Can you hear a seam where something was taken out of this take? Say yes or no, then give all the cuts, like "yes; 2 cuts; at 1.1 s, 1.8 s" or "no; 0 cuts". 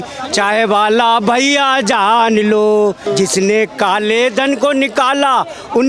yes; 1 cut; at 3.1 s